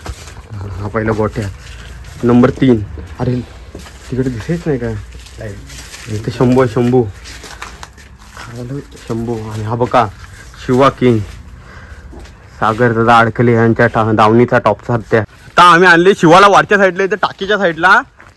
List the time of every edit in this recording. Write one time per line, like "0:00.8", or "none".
0:15.4